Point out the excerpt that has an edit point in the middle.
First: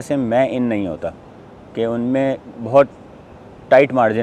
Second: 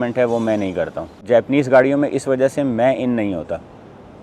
second; 1 cut; at 1.2 s

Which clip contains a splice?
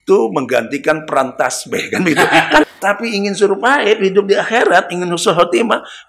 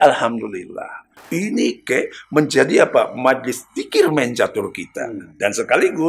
first; 1 cut; at 2.7 s

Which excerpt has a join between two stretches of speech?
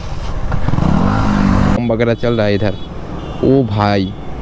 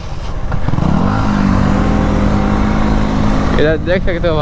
first; 1 cut; at 1.8 s

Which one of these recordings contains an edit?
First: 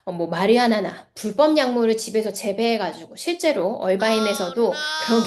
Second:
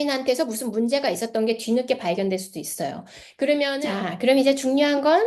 second; 1 cut; at 3.8 s

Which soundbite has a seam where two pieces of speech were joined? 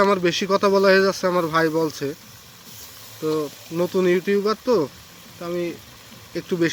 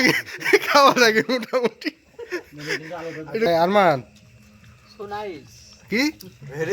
second; 1 cut; at 3.5 s

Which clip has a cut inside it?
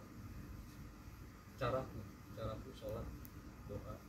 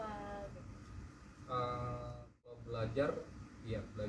second; 1 cut; at 2.6 s

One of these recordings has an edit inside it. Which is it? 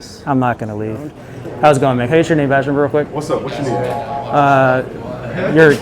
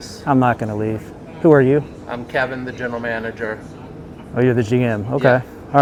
first; 1 cut; at 1.2 s

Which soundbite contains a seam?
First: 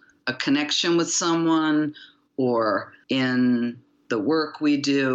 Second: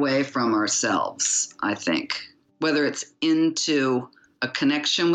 first; 1 cut; at 2.9 s

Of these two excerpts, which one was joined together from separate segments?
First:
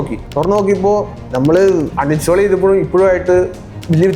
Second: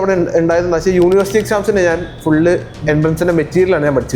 first; 1 cut; at 1.9 s

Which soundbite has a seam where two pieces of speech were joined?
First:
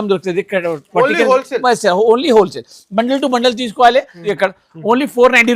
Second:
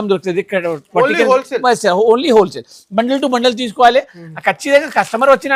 first; 1 cut; at 4.3 s

